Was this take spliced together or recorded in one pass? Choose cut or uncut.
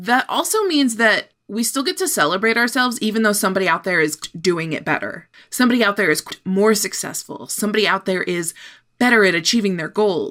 uncut